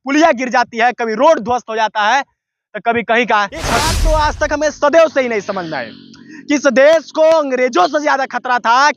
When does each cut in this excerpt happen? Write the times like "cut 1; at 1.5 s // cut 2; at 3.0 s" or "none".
cut 1; at 4.0 s